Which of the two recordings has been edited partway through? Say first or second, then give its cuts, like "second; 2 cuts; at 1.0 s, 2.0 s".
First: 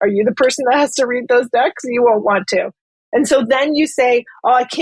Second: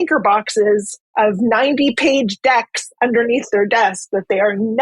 second; 1 cut; at 1.0 s